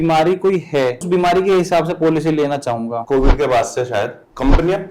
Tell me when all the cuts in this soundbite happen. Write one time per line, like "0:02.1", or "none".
0:01.1
0:03.0